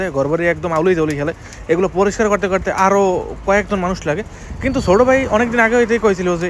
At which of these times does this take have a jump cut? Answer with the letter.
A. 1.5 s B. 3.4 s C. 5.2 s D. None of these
D